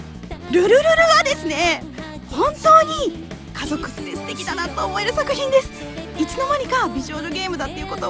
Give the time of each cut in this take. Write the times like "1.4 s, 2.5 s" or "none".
4.9 s